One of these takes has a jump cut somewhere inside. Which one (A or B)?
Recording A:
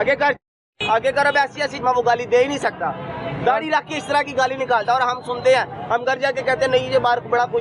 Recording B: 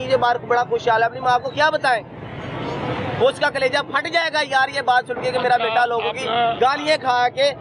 A